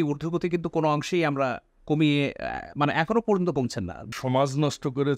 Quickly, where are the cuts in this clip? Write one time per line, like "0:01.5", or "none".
0:04.1